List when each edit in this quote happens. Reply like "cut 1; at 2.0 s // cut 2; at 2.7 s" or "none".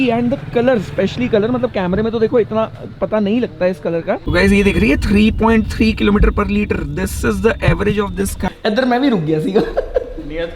cut 1; at 4.2 s // cut 2; at 8.5 s